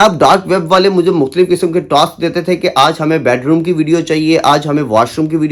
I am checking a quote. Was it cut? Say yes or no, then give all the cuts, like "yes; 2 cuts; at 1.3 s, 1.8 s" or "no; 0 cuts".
no; 0 cuts